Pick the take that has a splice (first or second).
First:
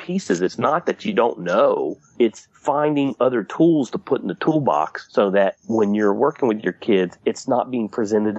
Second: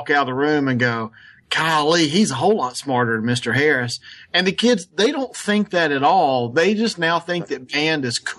first